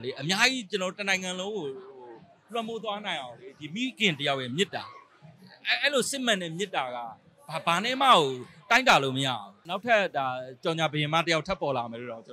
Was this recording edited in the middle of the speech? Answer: yes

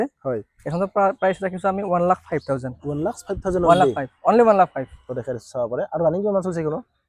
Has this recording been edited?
no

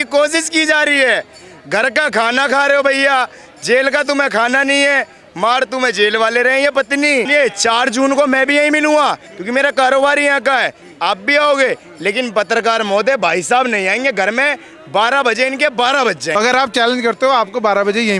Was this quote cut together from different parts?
yes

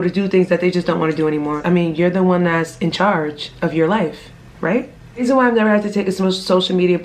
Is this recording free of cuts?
no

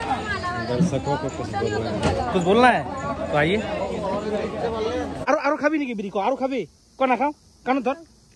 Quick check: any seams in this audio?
yes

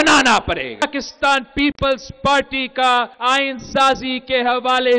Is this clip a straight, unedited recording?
no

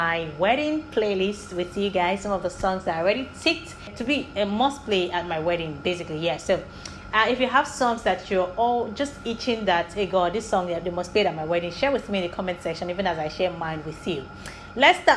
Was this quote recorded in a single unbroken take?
yes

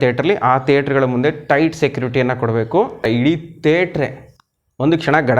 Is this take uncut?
no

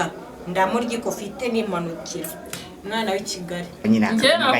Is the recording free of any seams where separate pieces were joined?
no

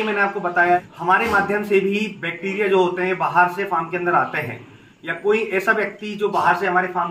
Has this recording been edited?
yes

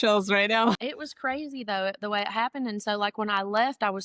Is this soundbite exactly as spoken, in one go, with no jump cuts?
no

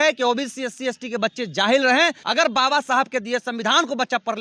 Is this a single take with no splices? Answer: no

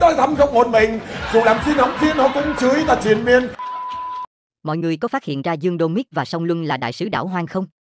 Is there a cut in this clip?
no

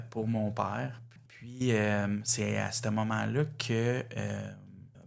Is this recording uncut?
no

